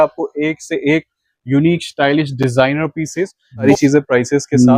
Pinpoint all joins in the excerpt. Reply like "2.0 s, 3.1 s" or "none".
3.7 s